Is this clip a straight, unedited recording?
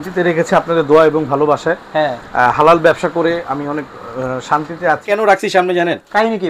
no; 1 cut; at 5.0 s

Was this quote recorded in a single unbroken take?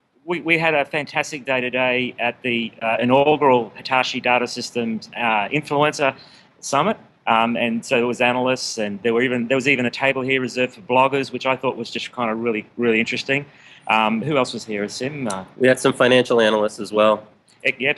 no; 1 cut; at 4.1 s

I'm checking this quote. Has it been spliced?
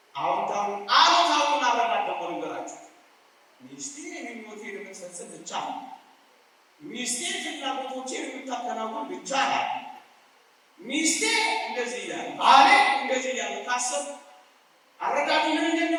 no; 0 cuts

